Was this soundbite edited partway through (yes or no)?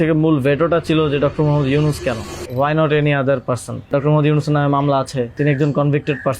yes